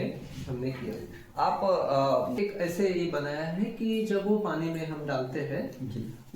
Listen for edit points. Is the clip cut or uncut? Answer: cut